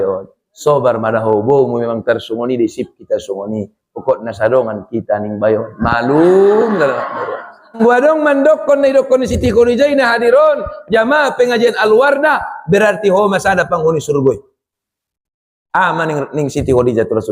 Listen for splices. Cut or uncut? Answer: cut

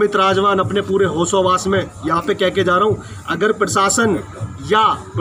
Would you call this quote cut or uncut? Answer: uncut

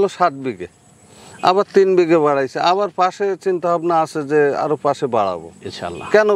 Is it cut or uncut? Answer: uncut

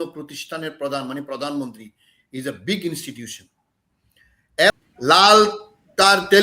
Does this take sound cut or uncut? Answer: cut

